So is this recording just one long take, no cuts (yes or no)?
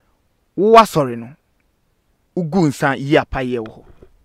yes